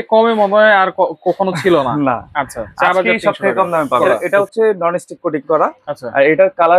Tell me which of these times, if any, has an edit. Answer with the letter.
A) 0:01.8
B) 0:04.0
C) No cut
B